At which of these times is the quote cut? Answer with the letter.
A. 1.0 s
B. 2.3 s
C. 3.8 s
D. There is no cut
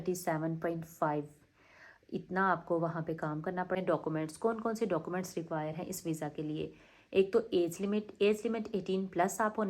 C